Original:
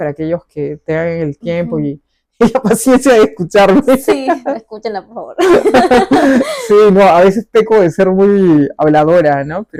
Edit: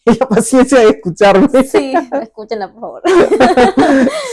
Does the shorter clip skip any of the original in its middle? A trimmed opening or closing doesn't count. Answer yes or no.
no